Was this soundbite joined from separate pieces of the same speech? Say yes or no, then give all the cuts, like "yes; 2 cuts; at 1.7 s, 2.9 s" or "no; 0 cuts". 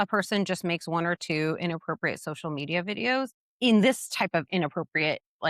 yes; 1 cut; at 3.4 s